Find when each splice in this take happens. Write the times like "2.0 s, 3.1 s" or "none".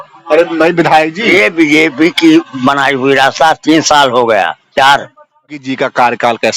5.6 s